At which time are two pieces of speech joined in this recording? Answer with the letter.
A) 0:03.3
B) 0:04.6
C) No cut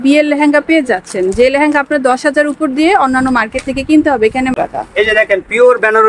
B